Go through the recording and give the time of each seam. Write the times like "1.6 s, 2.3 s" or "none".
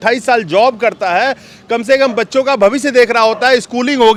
none